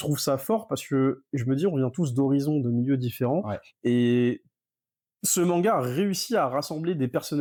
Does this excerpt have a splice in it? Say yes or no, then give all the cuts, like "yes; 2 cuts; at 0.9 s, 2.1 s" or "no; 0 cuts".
no; 0 cuts